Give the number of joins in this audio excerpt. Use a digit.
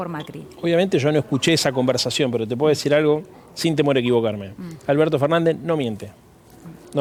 0